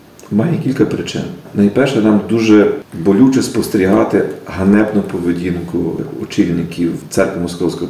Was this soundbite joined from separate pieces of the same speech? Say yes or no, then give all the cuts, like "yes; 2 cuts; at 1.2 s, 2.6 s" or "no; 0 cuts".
yes; 4 cuts; at 1.4 s, 2.9 s, 6.0 s, 7.0 s